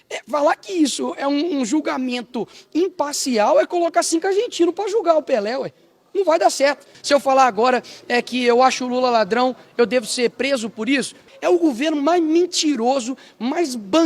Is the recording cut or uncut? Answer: cut